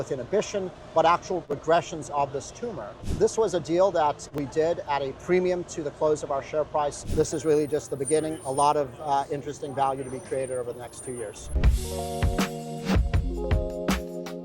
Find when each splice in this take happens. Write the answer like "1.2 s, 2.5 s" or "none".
1.5 s, 3.0 s, 4.3 s, 7.0 s, 11.5 s